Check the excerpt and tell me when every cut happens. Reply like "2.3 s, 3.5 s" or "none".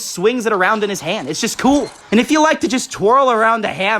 2.0 s